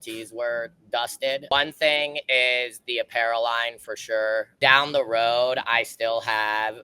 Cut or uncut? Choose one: cut